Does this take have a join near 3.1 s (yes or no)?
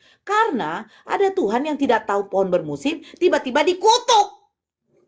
no